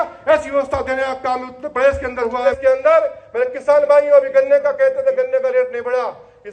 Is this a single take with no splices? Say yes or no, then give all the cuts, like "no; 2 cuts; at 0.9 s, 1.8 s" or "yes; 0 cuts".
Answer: no; 1 cut; at 2.5 s